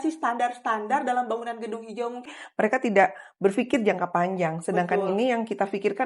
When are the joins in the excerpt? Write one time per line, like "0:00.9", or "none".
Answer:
0:02.3